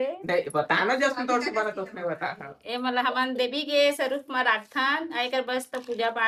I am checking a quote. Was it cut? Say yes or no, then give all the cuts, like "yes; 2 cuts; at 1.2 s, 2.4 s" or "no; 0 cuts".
no; 0 cuts